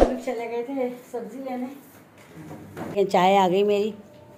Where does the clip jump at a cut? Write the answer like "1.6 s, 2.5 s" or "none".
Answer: 2.9 s